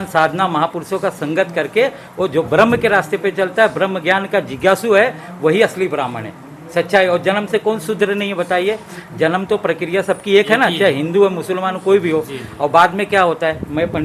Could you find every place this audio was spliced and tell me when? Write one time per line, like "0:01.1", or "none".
none